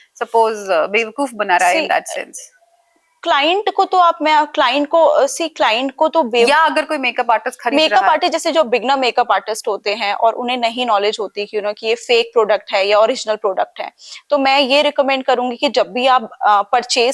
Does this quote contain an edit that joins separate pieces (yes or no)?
no